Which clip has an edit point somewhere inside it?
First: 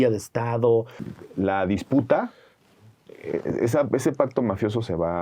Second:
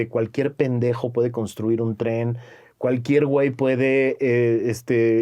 first; 1 cut; at 1.0 s

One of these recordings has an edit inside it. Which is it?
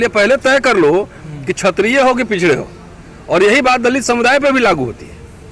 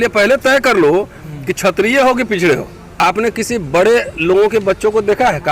second; 1 cut; at 2.8 s

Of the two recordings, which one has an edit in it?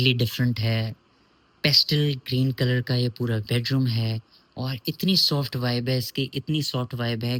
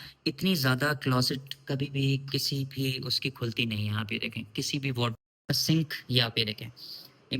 second; 1 cut; at 5.4 s

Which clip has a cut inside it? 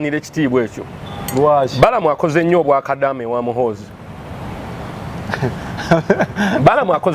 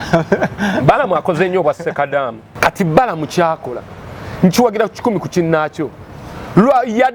second; 1 cut; at 2.4 s

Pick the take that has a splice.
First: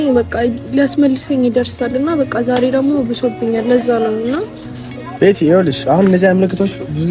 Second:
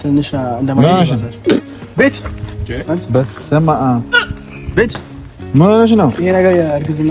first; 1 cut; at 5.0 s

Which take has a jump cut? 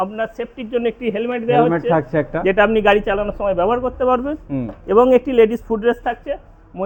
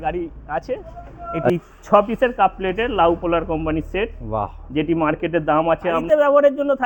second; 2 cuts; at 1.5 s, 6.0 s

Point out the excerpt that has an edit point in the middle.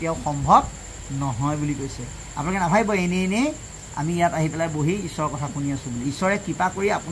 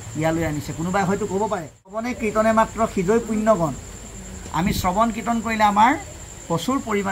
second; 1 cut; at 2.1 s

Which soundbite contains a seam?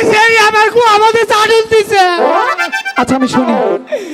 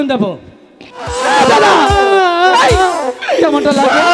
second; 1 cut; at 1.2 s

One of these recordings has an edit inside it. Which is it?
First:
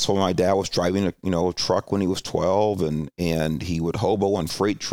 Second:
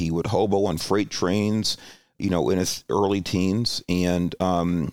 second; 1 cut; at 2.1 s

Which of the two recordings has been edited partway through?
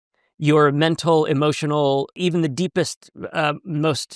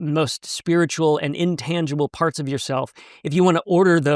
first; 1 cut; at 2.2 s

